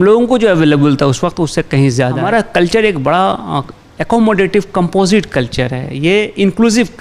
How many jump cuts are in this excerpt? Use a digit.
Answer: 1